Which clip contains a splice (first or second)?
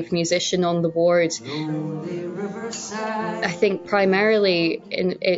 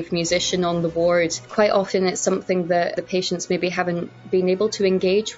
second